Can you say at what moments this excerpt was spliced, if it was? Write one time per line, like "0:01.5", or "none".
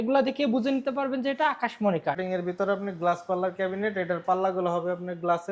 0:02.2